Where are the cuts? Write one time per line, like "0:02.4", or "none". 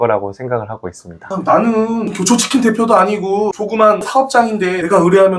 0:01.3
0:04.1